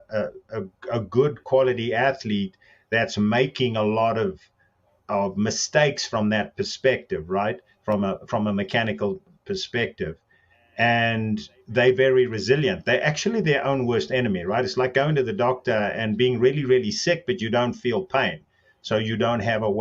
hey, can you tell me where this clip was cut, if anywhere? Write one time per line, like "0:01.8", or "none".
none